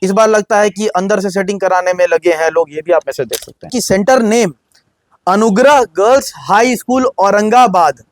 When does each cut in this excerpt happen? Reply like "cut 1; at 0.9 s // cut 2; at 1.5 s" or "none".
cut 1; at 3.8 s